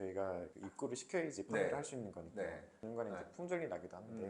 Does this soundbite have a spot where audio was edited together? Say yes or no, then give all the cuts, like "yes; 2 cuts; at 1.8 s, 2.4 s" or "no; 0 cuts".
yes; 1 cut; at 2.8 s